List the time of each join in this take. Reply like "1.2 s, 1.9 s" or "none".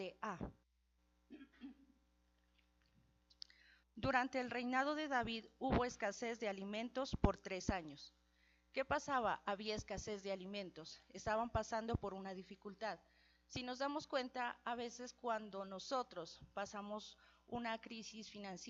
none